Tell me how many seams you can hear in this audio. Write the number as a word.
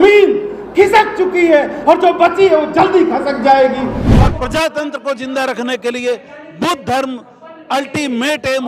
one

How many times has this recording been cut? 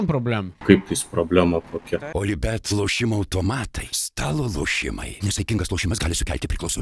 one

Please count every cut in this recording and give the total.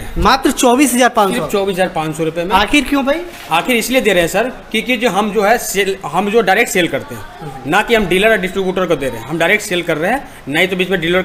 zero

